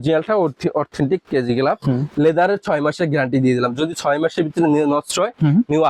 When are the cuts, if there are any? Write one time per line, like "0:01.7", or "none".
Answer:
0:02.1